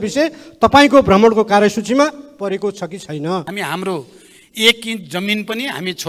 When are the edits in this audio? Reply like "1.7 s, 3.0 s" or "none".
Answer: 3.5 s

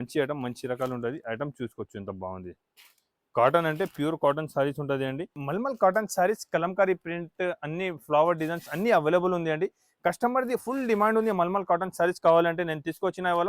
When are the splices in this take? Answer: 5.4 s

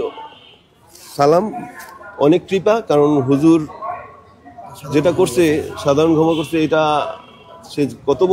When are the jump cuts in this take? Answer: none

